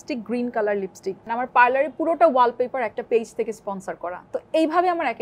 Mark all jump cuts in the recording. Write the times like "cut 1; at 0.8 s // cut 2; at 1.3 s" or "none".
cut 1; at 1.3 s